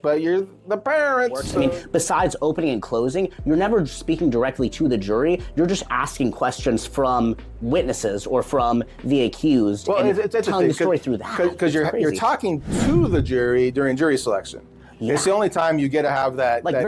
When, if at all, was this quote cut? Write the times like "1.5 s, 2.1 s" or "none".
1.5 s